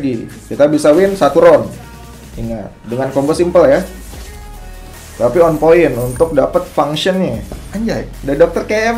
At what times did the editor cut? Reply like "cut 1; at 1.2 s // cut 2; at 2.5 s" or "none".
none